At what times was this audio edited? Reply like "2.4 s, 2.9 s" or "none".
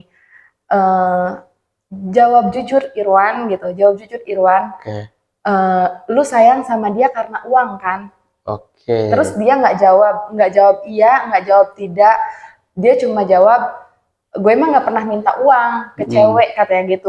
none